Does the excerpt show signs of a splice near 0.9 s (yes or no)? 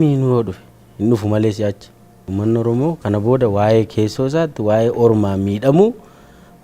no